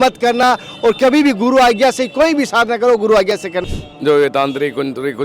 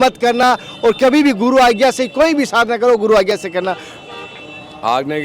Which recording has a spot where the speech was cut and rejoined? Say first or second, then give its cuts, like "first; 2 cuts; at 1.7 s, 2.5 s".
first; 1 cut; at 3.6 s